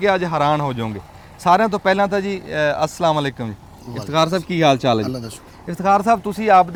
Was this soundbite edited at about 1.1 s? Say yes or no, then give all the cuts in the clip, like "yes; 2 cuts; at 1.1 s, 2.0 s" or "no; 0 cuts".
no; 0 cuts